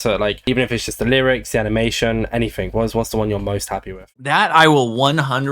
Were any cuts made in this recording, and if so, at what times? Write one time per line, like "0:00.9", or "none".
0:04.0